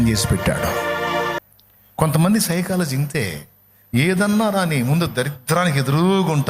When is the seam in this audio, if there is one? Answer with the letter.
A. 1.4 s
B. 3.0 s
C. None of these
A